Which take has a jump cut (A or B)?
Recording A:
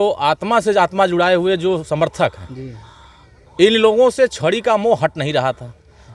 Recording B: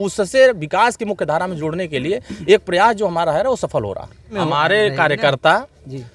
B